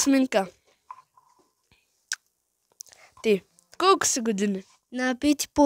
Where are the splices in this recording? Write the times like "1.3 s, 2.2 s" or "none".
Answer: 3.8 s